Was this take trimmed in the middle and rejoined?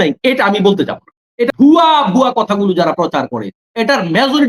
yes; 1 cut; at 1.5 s

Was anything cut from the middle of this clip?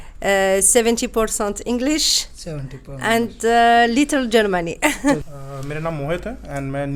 no; 0 cuts

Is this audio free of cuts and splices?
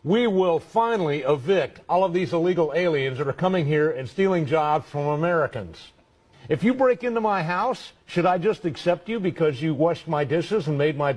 yes; 0 cuts

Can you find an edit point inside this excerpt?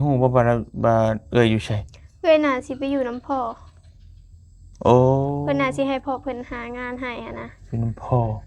no; 0 cuts

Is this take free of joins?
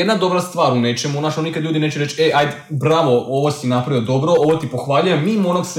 yes; 0 cuts

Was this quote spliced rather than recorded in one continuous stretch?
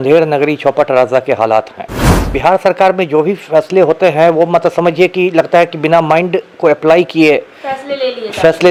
no; 0 cuts

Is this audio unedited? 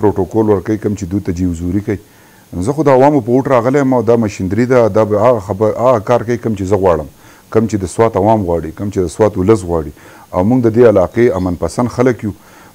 yes; 0 cuts

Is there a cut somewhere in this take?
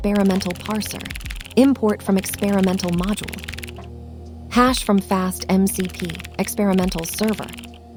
no; 0 cuts

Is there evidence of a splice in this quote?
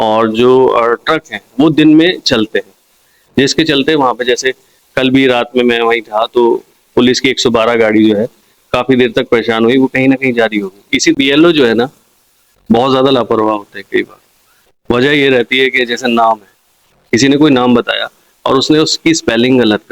yes; 1 cut; at 11.2 s

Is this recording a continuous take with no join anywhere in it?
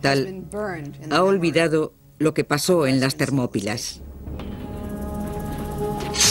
no; 1 cut; at 3.8 s

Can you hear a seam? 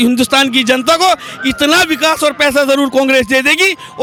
no; 0 cuts

